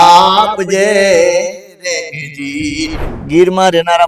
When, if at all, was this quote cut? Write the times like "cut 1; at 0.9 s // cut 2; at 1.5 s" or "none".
cut 1; at 3.0 s